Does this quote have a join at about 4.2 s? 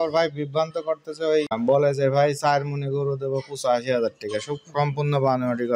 no; 1 cut; at 1.6 s

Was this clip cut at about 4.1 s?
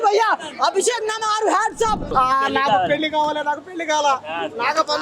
no; 1 cut; at 2.1 s

